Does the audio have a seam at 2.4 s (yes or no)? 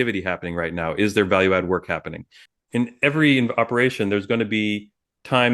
yes